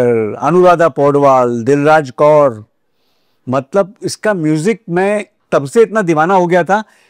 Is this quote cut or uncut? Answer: uncut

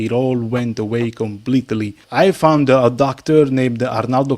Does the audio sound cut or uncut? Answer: cut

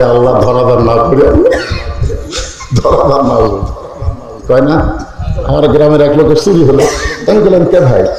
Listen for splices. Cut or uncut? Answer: uncut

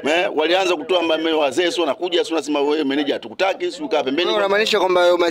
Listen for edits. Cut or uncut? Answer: uncut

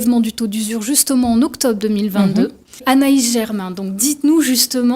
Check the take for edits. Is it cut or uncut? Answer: cut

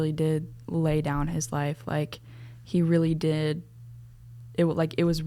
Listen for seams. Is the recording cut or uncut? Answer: uncut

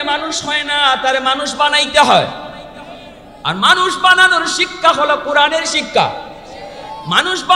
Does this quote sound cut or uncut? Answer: uncut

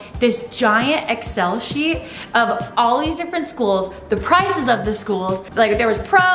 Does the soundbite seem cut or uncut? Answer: uncut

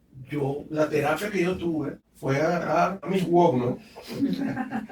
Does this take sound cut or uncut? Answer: cut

